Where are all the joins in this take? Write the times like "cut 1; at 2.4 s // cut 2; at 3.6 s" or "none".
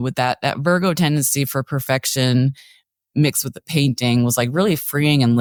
none